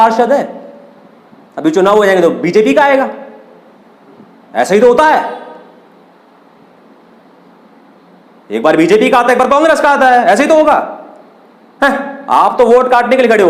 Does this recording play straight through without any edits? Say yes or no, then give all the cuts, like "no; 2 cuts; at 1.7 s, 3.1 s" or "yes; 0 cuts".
yes; 0 cuts